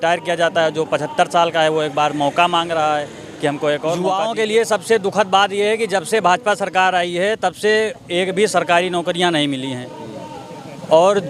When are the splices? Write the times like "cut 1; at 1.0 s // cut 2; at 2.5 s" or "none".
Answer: cut 1; at 4.0 s